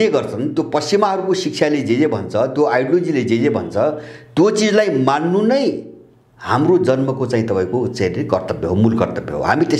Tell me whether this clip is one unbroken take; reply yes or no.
yes